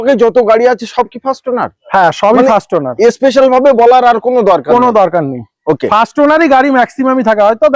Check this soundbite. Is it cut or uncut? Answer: uncut